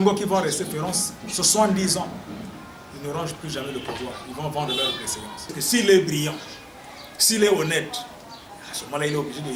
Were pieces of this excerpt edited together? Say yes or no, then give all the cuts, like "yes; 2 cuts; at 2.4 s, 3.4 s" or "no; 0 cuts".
yes; 1 cut; at 5.6 s